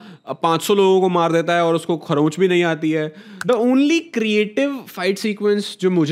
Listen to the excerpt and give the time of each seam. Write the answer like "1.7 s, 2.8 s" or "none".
3.3 s

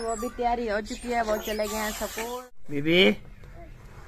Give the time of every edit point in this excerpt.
2.2 s

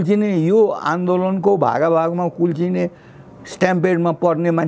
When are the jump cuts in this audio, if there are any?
none

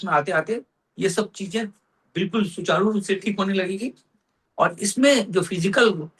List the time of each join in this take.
none

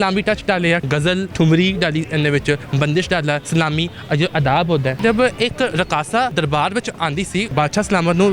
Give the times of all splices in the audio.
0.9 s, 3.4 s, 5.0 s, 6.3 s, 7.5 s

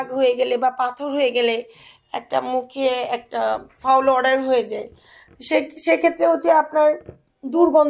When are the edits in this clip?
none

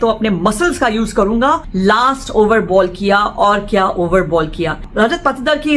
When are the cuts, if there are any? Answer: 1.7 s, 4.8 s

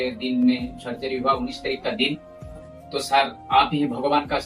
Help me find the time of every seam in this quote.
2.7 s

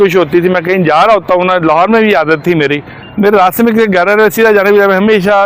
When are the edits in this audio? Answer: none

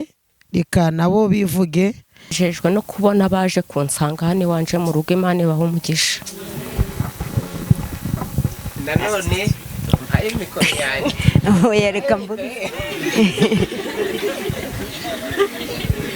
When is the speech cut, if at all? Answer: 2.3 s

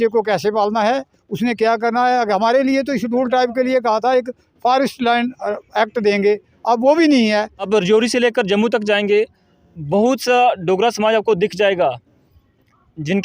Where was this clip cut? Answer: 7.7 s

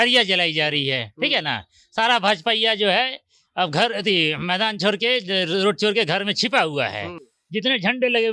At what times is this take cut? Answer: none

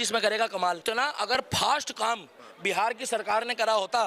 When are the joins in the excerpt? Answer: 1.4 s

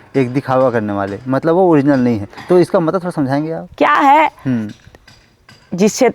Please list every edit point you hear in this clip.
none

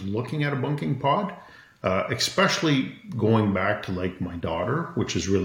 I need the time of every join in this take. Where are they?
none

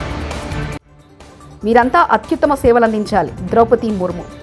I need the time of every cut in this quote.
none

